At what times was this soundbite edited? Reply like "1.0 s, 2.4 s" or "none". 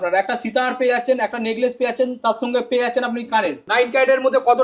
3.6 s